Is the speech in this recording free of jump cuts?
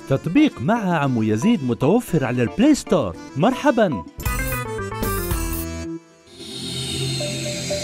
yes; 0 cuts

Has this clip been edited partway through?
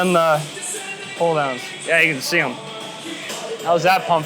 yes; 1 cut; at 3.3 s

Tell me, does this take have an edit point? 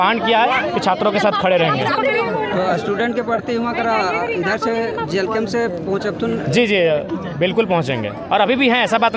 no; 0 cuts

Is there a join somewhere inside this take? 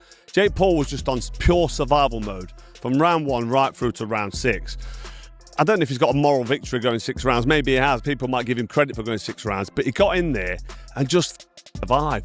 no; 0 cuts

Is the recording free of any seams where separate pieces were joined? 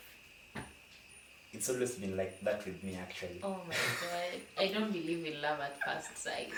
yes; 0 cuts

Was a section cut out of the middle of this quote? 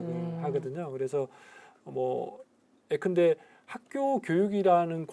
no; 0 cuts

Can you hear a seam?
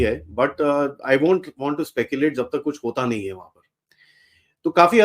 no; 0 cuts

